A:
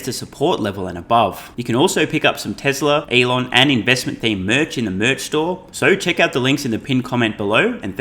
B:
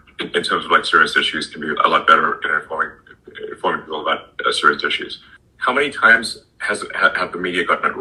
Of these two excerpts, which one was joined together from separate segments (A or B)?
A